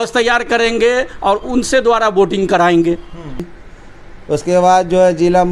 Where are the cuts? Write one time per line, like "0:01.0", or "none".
0:03.5